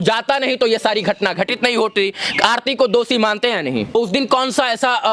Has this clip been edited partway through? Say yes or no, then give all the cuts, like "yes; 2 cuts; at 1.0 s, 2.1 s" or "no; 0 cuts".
yes; 1 cut; at 3.9 s